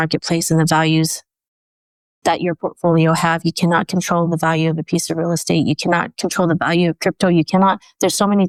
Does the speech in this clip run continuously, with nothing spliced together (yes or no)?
yes